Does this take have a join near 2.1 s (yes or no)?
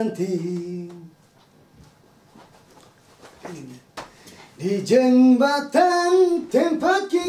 no